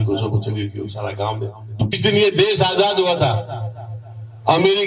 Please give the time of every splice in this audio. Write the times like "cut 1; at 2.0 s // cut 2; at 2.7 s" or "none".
cut 1; at 1.9 s